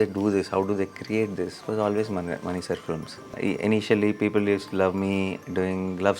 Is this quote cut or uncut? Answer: cut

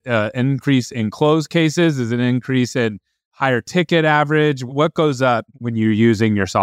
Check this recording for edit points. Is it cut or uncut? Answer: cut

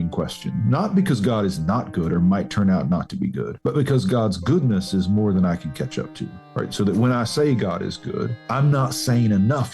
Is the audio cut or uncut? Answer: cut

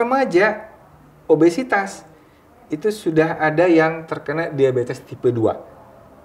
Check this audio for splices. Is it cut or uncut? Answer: uncut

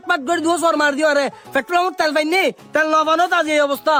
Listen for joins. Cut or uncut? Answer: uncut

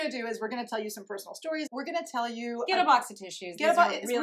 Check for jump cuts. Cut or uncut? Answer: cut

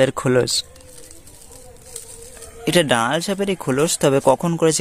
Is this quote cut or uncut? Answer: uncut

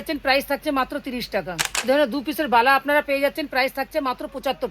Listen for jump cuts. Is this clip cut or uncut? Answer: cut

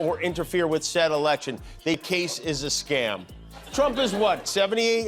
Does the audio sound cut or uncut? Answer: cut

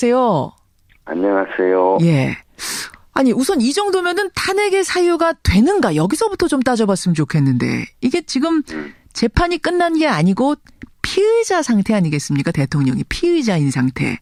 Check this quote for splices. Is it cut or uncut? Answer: uncut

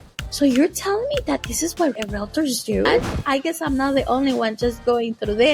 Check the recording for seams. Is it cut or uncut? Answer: cut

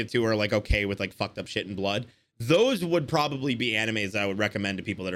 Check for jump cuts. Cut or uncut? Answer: uncut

